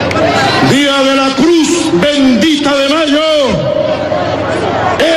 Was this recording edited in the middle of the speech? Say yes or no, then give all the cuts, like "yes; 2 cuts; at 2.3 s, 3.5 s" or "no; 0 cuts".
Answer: no; 0 cuts